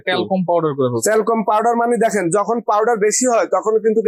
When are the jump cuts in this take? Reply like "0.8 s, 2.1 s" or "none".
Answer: none

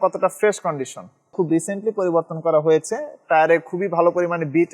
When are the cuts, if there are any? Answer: 1.2 s

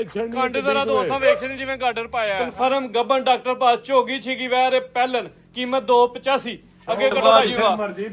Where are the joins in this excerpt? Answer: 2.4 s, 7.2 s

